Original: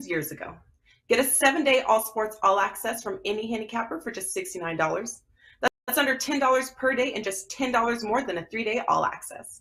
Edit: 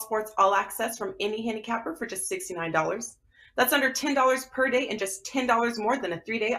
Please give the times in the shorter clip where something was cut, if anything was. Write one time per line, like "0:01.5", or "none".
0:03.7